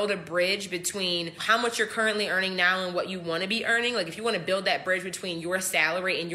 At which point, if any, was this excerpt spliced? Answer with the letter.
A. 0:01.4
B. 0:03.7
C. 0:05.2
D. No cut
A